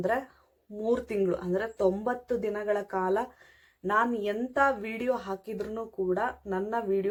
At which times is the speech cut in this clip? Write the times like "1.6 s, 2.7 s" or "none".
none